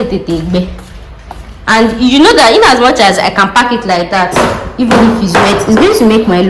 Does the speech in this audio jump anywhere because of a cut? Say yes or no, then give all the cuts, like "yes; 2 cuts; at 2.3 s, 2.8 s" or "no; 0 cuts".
no; 0 cuts